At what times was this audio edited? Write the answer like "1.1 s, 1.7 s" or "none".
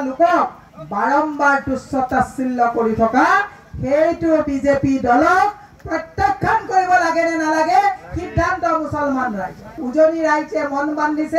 9.7 s